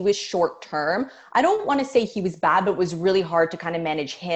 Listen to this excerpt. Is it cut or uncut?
uncut